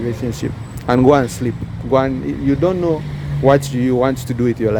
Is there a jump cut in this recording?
no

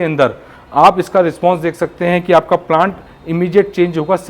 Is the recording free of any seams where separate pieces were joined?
yes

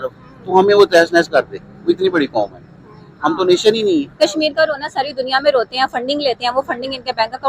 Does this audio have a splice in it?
yes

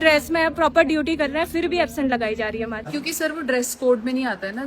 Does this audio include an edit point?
yes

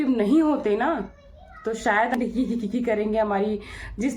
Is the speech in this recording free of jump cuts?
no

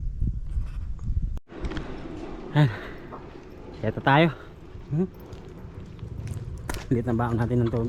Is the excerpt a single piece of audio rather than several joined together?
yes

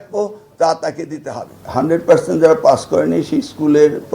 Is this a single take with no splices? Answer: no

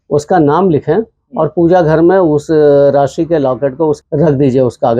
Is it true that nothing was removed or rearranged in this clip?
no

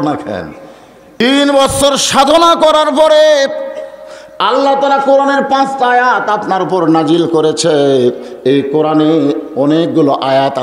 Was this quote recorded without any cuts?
no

